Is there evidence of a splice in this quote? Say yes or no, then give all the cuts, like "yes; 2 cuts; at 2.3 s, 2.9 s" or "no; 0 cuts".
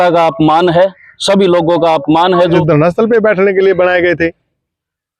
yes; 1 cut; at 2.6 s